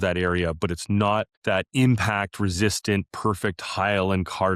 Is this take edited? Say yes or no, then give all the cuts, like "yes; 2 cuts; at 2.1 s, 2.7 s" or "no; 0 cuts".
yes; 1 cut; at 1.3 s